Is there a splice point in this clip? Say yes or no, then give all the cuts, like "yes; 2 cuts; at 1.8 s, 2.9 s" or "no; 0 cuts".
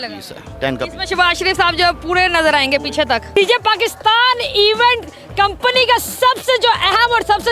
yes; 1 cut; at 3.3 s